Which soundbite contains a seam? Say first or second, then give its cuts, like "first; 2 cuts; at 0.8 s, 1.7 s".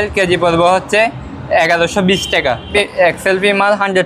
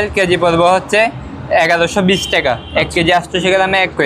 first; 1 cut; at 2.7 s